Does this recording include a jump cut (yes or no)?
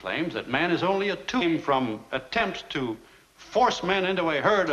no